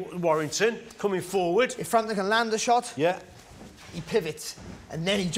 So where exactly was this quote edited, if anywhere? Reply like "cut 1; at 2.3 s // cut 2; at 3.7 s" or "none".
none